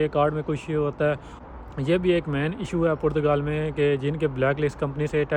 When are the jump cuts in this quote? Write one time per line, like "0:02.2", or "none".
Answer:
none